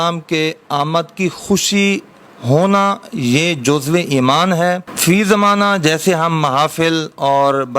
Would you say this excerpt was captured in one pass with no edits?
yes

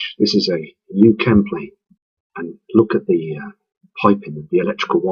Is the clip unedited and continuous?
no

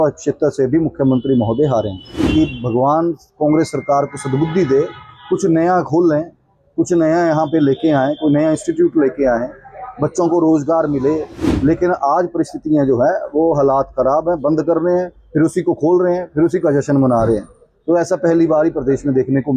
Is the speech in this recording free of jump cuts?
no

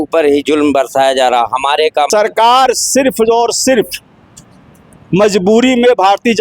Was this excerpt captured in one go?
no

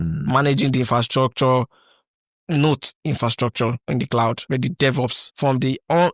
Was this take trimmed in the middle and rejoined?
yes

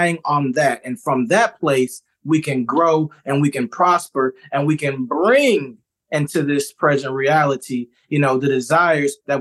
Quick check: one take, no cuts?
yes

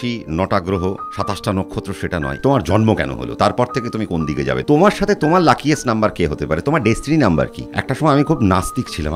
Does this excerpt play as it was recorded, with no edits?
no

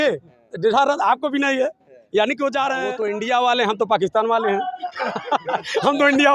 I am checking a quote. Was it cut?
yes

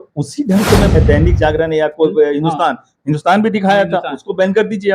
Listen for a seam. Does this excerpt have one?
yes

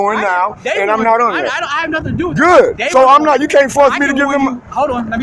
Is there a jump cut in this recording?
no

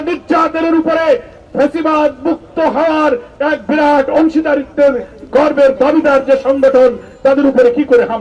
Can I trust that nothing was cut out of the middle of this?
yes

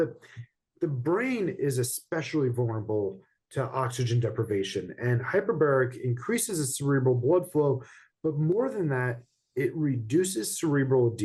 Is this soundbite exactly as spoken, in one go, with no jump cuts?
yes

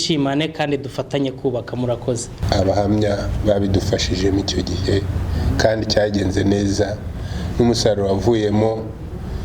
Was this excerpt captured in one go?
no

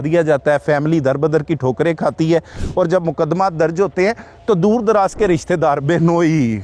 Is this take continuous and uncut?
yes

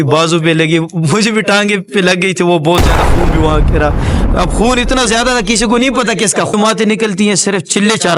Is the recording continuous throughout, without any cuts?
no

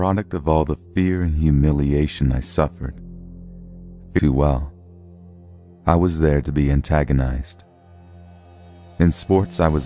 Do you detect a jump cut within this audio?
no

